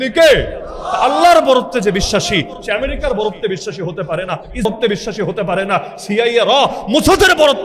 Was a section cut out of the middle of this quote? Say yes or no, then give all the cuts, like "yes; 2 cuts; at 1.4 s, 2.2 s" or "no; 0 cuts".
yes; 1 cut; at 4.6 s